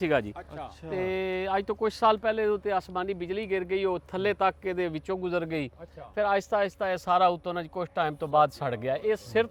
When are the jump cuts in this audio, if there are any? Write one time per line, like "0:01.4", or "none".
none